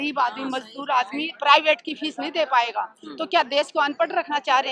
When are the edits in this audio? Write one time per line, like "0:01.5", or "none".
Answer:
none